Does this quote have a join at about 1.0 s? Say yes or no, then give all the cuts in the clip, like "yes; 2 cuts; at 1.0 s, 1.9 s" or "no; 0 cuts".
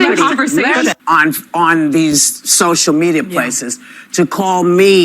yes; 1 cut; at 1.0 s